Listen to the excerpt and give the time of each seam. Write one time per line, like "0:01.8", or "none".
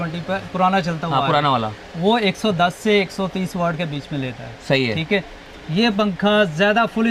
none

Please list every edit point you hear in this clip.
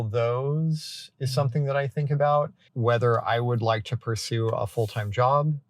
0:02.6

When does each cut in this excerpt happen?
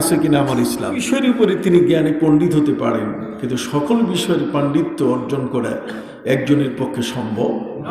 0:01.1

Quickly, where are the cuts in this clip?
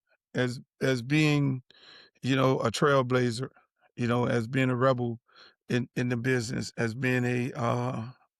none

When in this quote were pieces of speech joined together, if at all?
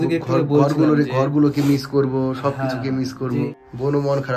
0:03.5

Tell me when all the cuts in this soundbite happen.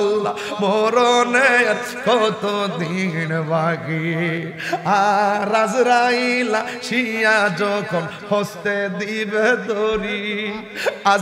none

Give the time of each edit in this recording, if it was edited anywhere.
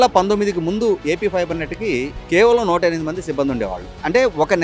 none

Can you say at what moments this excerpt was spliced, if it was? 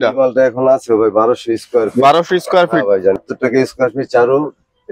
0:03.2

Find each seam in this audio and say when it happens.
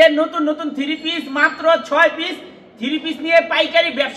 none

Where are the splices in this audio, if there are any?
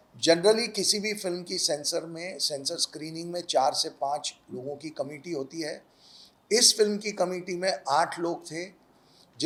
none

